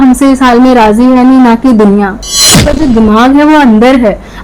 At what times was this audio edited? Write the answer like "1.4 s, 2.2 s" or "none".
2.7 s